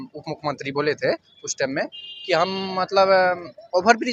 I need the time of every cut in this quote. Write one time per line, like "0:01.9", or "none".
none